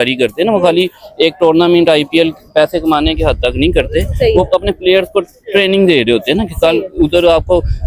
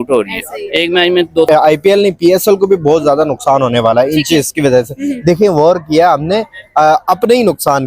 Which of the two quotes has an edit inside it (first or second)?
second